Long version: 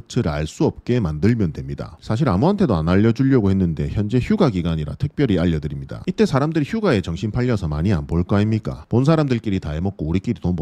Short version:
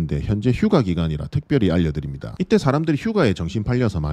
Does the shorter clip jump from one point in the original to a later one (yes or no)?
no